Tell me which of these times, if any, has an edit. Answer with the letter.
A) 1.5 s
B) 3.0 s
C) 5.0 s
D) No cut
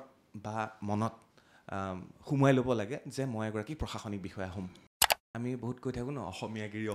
C